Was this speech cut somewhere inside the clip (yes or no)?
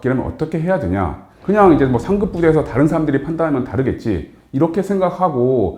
yes